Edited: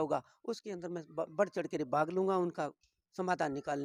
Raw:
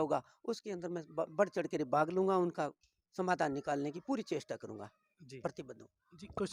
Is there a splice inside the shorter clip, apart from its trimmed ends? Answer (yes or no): no